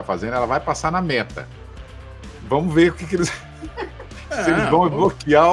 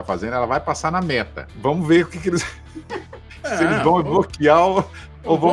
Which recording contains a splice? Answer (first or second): second